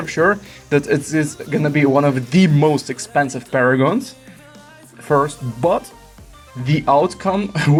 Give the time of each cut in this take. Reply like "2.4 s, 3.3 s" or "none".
none